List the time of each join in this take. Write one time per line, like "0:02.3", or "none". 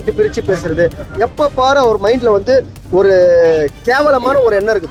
none